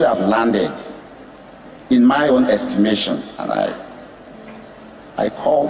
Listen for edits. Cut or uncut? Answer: uncut